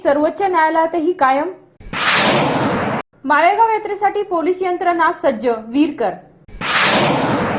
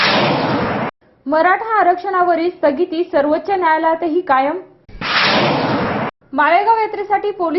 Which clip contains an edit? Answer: second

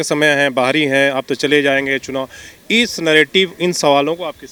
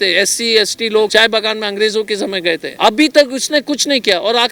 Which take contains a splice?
second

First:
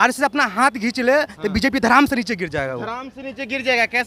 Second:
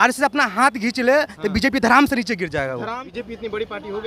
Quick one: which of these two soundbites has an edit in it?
second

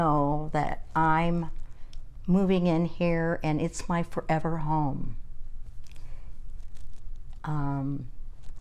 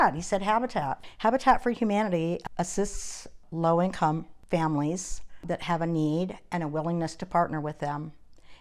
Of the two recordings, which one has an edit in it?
second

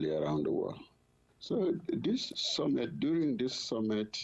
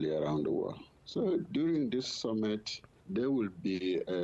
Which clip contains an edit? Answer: second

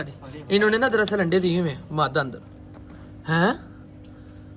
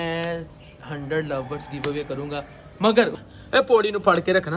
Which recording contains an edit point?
second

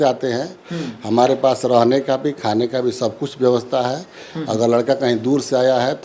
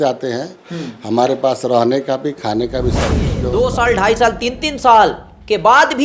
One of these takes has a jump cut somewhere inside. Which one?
second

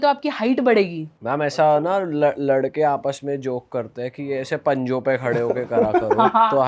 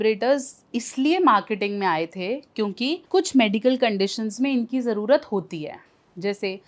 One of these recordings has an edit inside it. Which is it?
second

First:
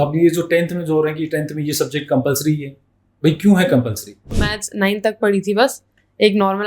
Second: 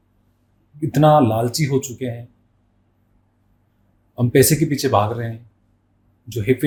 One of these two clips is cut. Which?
first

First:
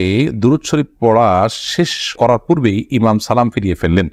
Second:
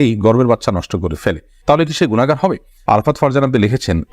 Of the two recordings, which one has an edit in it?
second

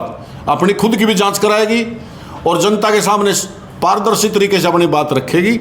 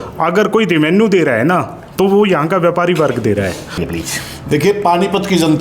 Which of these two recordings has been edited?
second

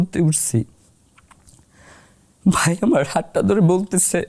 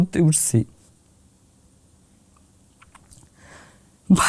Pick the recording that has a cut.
first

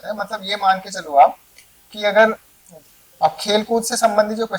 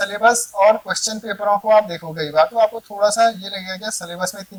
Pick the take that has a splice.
first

